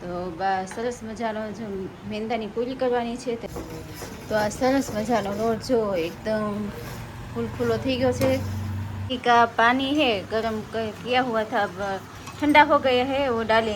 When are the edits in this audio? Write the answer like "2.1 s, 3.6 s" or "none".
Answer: 3.5 s, 9.1 s